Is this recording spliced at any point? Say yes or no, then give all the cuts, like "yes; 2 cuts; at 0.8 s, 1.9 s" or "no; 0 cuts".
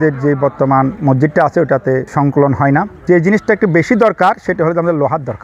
yes; 3 cuts; at 1.0 s, 2.1 s, 2.9 s